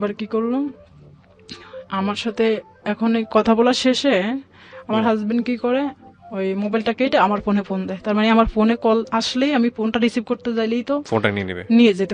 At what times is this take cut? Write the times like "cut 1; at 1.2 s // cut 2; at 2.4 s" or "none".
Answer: none